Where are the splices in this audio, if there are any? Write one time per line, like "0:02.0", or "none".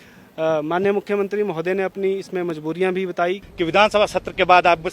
0:03.4

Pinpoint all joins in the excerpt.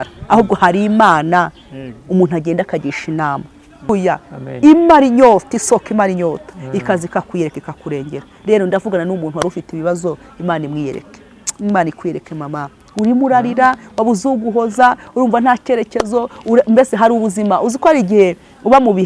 0:03.9

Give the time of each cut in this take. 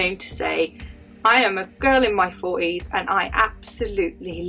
none

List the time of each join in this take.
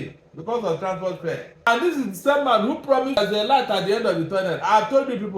0:01.7
0:03.2

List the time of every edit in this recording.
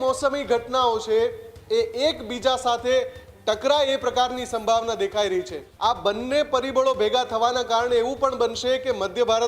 0:05.6

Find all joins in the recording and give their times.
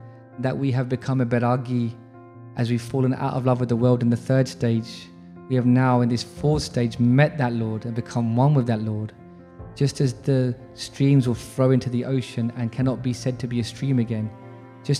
none

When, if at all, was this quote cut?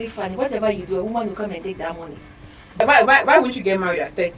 0:02.8

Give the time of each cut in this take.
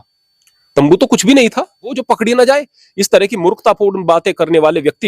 0:01.9

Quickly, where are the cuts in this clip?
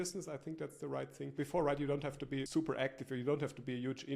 0:01.2
0:02.5

